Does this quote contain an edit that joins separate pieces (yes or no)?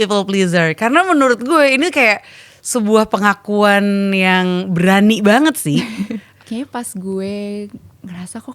yes